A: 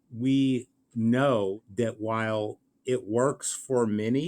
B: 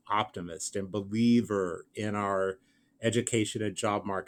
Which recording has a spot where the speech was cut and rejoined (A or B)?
A